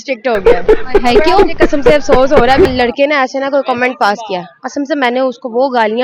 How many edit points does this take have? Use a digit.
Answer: 1